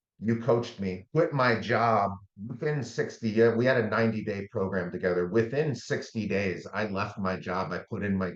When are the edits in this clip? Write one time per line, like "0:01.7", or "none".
0:01.0
0:02.3